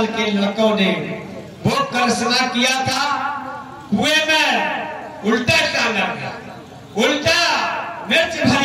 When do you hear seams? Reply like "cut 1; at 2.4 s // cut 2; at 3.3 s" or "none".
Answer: none

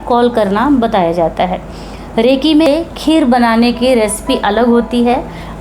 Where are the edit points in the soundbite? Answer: cut 1; at 2.7 s

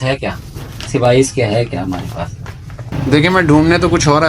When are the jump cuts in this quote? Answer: cut 1; at 2.8 s

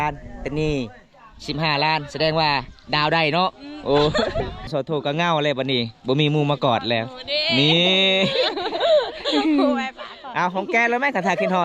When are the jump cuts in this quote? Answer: cut 1; at 4.7 s

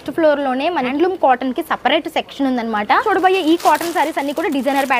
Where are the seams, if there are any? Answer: cut 1; at 0.9 s // cut 2; at 3.0 s

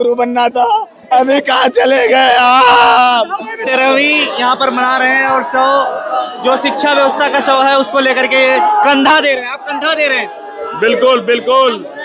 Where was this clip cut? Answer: cut 1; at 3.7 s

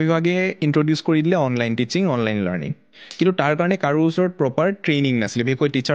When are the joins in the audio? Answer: none

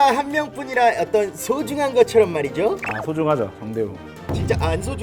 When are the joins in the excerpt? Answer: none

